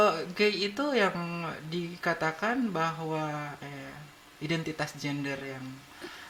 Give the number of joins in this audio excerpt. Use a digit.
0